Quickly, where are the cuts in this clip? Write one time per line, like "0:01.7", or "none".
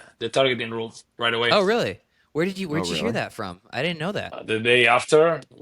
0:04.4